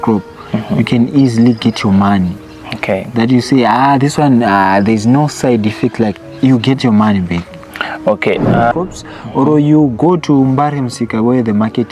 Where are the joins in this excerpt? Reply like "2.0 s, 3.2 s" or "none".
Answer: 8.7 s